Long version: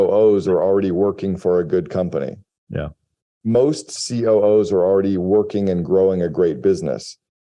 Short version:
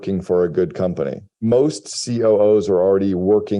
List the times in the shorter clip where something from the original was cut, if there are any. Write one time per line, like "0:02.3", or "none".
0:01.2

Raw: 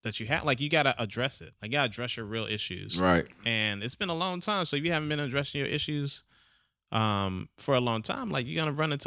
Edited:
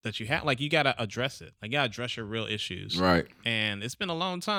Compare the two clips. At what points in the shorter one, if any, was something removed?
none

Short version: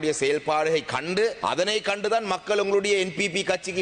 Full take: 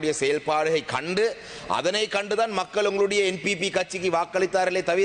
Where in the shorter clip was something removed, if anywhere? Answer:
0:01.4

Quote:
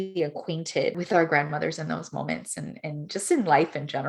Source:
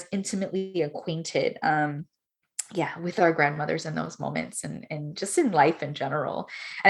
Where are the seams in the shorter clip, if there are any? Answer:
0:01.0

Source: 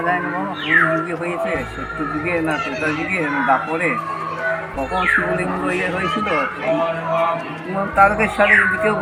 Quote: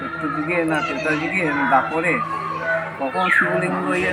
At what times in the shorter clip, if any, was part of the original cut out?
none

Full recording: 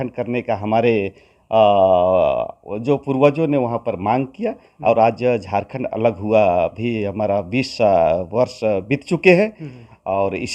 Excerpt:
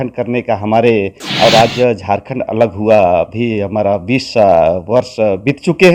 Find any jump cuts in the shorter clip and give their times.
0:01.2

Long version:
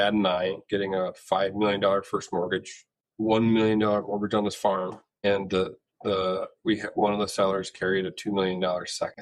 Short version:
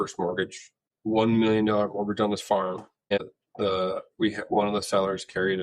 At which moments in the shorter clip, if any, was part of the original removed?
0:03.2

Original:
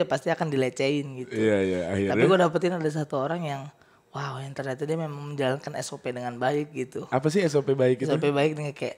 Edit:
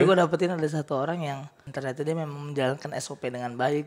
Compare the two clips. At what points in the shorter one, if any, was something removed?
0:01.6

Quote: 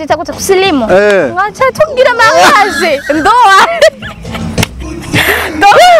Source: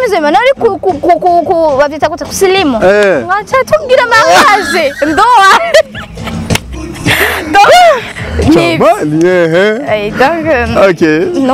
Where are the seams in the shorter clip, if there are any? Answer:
none

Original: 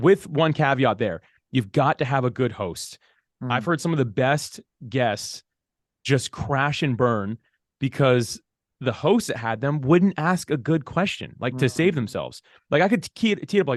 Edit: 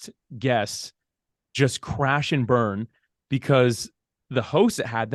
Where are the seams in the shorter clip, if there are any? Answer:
none

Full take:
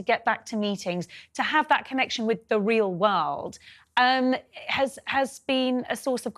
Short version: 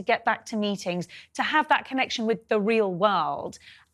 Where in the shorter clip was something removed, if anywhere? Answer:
none

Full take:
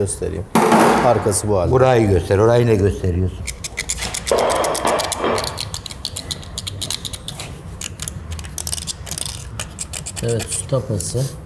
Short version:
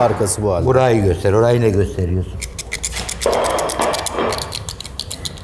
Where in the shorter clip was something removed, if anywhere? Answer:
none

